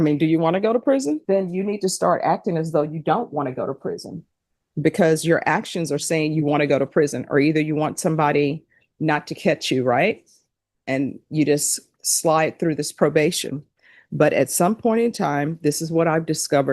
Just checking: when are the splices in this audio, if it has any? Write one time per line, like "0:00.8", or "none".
0:01.2